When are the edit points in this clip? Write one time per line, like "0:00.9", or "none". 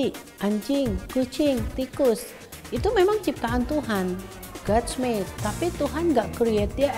none